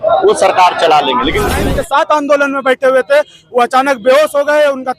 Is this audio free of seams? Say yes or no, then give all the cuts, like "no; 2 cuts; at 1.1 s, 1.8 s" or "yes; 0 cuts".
no; 1 cut; at 1.5 s